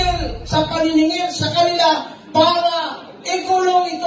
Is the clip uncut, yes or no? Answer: yes